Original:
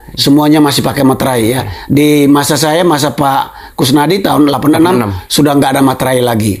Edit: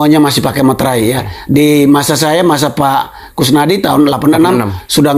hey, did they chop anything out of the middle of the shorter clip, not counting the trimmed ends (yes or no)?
no